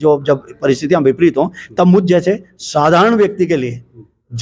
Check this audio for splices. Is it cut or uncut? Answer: uncut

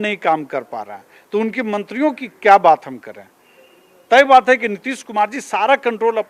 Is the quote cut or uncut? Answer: uncut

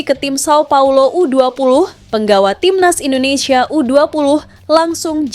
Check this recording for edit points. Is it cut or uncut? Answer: uncut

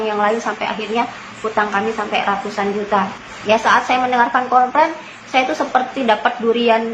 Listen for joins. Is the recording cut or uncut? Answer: cut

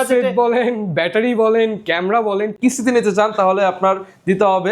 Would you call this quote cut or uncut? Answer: cut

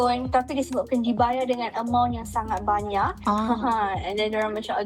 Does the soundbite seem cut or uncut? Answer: uncut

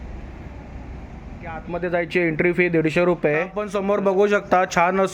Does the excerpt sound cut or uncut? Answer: cut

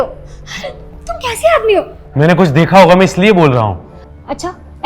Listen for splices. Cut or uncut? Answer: uncut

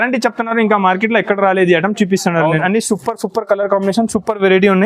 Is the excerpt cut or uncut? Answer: cut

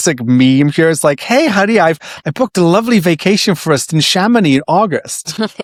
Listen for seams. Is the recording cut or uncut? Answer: uncut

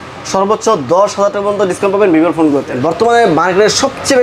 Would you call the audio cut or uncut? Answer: cut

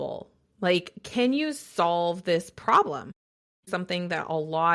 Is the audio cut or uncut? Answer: cut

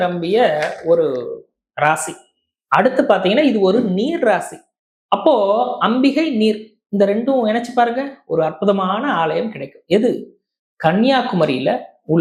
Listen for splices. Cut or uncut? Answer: uncut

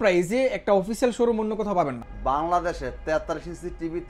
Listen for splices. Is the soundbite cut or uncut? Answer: cut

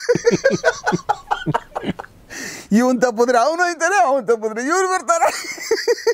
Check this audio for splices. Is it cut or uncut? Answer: uncut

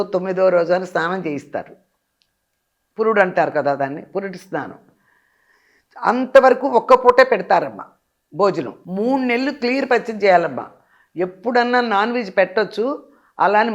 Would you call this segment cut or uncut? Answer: cut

